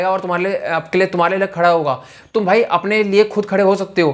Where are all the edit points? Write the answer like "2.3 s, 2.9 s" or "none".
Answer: none